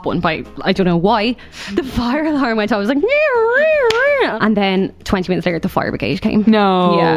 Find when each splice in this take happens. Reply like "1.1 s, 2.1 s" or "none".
1.5 s, 4.3 s